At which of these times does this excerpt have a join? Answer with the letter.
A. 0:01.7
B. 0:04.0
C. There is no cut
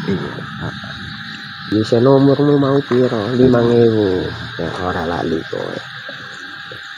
A